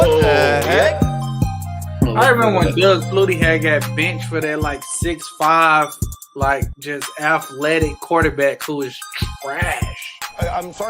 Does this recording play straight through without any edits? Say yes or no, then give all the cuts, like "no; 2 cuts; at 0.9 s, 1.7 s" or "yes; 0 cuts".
no; 1 cut; at 0.9 s